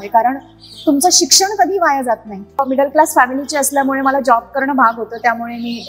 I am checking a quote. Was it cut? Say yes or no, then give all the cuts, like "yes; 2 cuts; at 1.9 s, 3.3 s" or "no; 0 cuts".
yes; 1 cut; at 2.5 s